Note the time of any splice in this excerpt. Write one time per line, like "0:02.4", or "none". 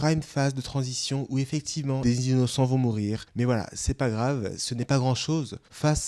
0:02.0
0:03.2